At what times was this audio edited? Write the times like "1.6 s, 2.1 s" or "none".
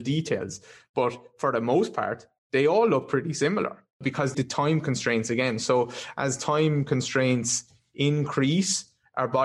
4.3 s